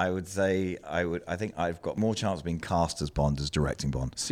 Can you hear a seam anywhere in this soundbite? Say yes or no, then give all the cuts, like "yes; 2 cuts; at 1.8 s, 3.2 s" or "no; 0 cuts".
yes; 1 cut; at 1.9 s